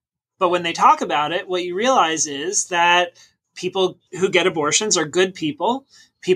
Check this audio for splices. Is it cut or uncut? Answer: cut